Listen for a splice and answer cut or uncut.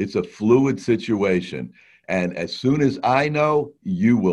uncut